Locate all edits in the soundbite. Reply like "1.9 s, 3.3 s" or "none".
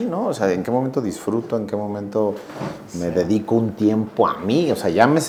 none